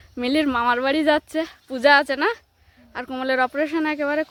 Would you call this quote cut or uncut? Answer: uncut